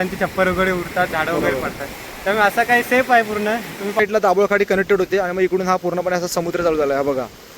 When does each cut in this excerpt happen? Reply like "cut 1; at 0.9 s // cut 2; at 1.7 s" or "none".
cut 1; at 4.0 s